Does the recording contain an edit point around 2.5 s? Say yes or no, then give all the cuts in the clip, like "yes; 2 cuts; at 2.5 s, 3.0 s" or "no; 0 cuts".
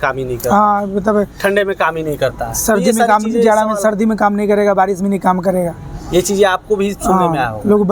no; 0 cuts